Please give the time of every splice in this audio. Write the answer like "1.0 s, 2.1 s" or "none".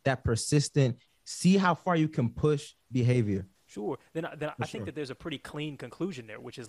1.0 s, 3.6 s